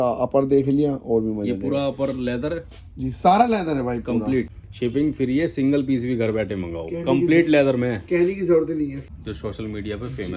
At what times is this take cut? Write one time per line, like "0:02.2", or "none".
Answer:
0:04.5
0:09.0